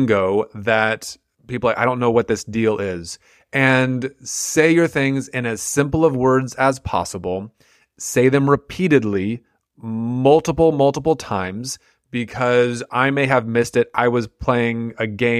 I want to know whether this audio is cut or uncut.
uncut